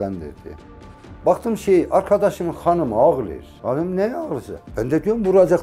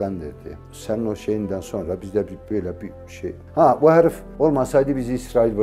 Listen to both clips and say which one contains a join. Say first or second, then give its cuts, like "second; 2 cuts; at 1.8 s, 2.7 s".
first; 2 cuts; at 1.0 s, 4.7 s